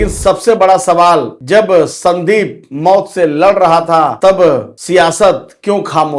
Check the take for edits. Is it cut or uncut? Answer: cut